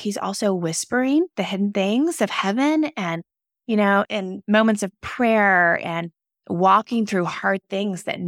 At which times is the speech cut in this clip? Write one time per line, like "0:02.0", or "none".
0:04.1